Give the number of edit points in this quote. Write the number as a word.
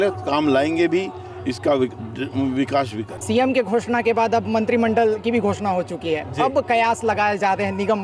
one